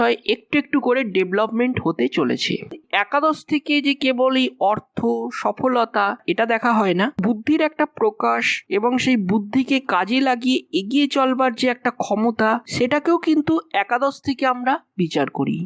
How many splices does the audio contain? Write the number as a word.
one